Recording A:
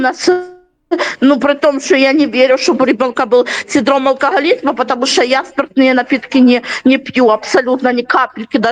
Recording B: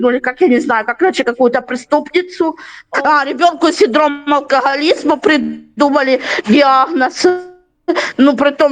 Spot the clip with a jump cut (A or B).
B